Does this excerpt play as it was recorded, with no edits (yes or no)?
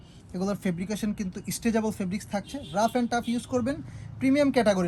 yes